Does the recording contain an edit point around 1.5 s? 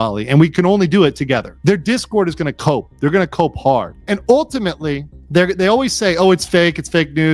yes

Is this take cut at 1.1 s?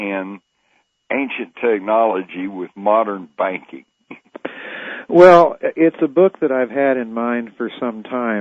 yes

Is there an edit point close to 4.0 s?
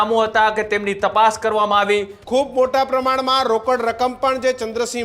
no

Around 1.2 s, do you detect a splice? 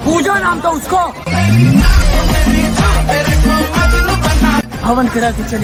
no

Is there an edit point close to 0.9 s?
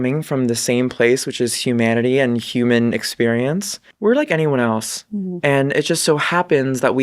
no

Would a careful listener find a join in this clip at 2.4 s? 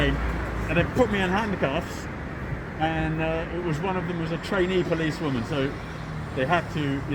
no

